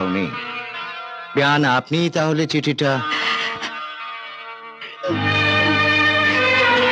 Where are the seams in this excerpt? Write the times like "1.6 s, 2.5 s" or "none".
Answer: none